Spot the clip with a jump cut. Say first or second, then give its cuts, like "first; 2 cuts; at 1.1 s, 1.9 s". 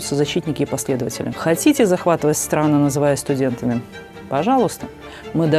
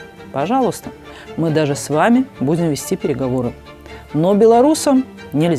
first; 1 cut; at 1.3 s